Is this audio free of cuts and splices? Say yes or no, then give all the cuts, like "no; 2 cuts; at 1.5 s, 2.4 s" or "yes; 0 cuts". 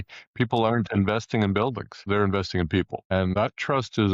no; 2 cuts; at 1.9 s, 3.1 s